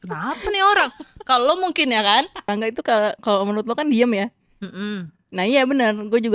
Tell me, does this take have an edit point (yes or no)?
yes